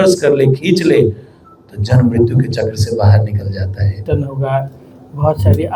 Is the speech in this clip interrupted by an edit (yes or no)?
yes